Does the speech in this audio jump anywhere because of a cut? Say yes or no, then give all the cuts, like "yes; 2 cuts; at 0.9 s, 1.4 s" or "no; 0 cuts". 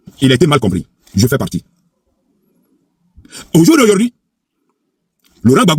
no; 0 cuts